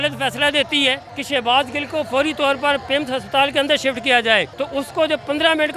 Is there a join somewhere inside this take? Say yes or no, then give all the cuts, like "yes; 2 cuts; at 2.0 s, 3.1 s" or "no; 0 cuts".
yes; 2 cuts; at 1.1 s, 4.5 s